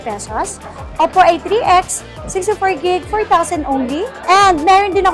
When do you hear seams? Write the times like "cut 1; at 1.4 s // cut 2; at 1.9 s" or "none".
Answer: cut 1; at 4.2 s